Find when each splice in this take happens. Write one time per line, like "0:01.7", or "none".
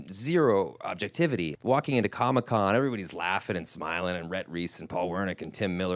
0:01.5